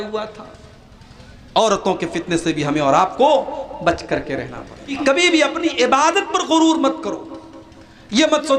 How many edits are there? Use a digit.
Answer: 1